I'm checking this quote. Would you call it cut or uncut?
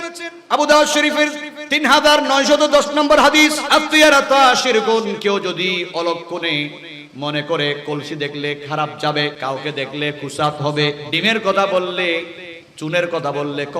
cut